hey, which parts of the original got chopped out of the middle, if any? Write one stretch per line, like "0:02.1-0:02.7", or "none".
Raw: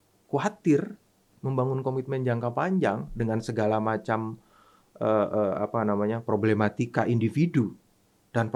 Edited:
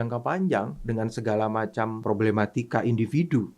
0:04.3-0:06.2